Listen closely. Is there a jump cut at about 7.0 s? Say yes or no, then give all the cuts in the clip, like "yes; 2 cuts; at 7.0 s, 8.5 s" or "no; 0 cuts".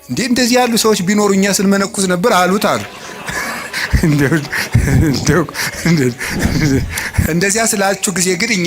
yes; 1 cut; at 7.0 s